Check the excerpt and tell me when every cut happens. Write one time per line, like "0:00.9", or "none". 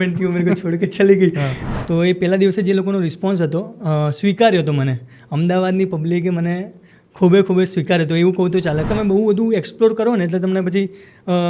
0:01.5
0:08.9